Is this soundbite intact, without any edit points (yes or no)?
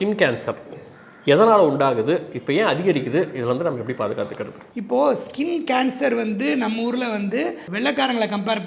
yes